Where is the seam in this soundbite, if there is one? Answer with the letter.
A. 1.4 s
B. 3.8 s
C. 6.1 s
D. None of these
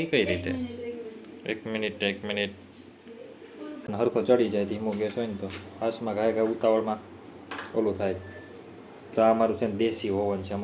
B